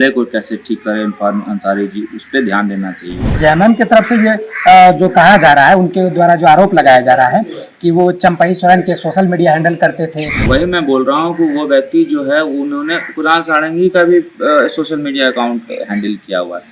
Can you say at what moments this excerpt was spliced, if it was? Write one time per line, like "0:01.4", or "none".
0:03.3
0:10.4